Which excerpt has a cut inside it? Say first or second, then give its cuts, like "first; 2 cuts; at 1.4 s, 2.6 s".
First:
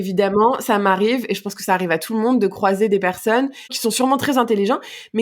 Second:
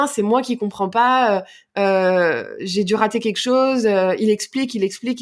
first; 1 cut; at 3.7 s